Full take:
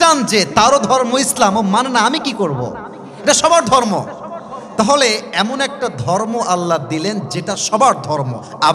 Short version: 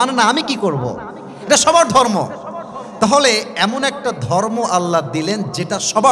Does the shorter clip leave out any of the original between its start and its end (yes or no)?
no